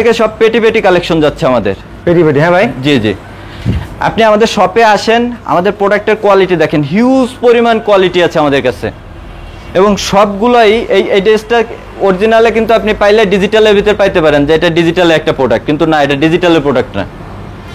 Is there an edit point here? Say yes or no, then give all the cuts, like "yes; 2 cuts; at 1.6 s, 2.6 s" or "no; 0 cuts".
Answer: no; 0 cuts